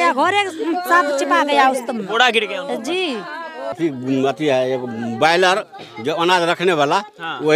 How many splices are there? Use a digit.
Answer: 1